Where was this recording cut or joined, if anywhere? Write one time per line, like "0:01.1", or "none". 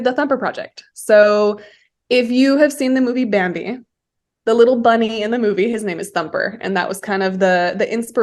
none